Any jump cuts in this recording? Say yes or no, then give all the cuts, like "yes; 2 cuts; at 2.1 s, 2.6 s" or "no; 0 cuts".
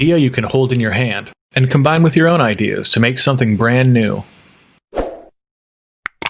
yes; 1 cut; at 5.1 s